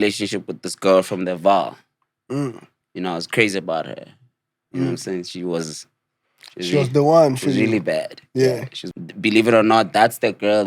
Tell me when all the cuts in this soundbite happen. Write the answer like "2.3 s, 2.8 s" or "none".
8.8 s